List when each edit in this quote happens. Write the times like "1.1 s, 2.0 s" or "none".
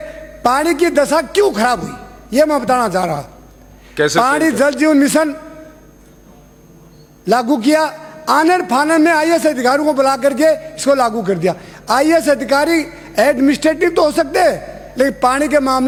none